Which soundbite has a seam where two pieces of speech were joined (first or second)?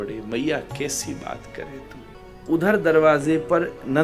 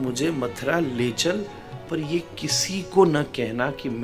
first